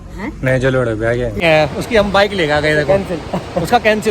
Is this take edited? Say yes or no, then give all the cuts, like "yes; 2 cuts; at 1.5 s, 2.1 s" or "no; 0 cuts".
yes; 1 cut; at 1.4 s